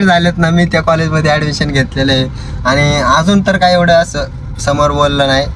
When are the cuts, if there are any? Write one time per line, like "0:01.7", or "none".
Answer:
none